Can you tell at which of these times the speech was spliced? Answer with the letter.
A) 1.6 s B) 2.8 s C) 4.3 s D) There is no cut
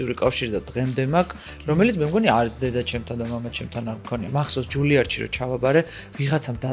C